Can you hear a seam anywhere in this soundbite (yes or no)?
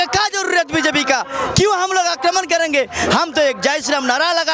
no